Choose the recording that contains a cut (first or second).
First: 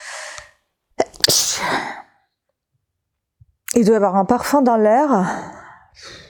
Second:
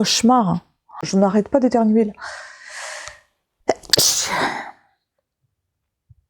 second